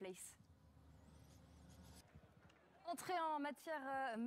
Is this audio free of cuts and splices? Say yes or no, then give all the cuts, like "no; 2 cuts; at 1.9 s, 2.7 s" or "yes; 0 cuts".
yes; 0 cuts